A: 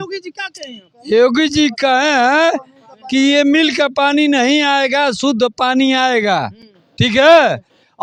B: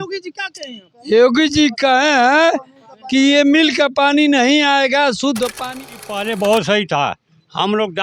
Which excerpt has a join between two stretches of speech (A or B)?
B